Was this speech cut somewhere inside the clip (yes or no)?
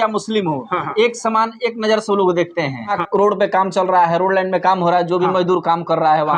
yes